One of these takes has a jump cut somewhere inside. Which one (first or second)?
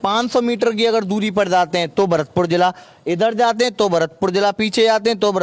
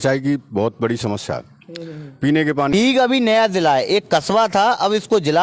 second